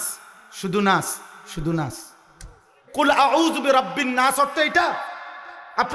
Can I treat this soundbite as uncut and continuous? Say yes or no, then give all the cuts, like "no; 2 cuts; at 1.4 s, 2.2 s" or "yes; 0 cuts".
no; 1 cut; at 2.8 s